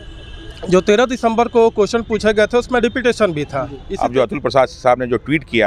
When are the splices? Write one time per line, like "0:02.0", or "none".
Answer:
0:03.8